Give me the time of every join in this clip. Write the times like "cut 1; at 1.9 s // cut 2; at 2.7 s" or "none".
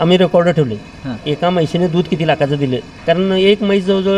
cut 1; at 2.9 s